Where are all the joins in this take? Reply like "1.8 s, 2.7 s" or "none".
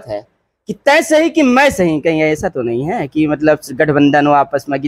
none